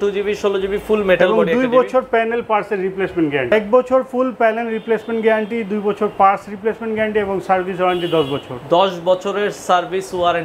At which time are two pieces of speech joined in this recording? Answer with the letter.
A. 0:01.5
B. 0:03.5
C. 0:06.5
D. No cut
B